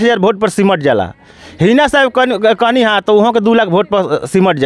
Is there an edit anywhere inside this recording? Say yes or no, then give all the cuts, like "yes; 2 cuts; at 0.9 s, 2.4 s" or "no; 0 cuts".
no; 0 cuts